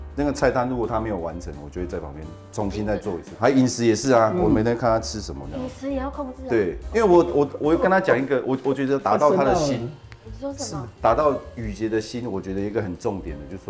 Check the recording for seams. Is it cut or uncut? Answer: cut